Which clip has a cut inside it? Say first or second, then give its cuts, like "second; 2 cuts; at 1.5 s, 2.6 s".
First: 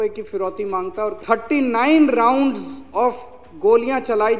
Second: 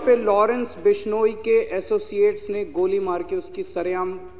first; 1 cut; at 1.2 s